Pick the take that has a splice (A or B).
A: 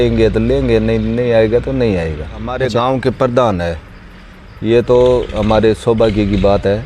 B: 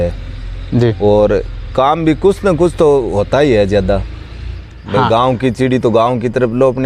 A